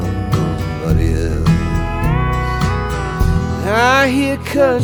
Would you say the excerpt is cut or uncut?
uncut